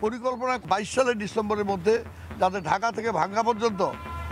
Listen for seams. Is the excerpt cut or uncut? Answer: uncut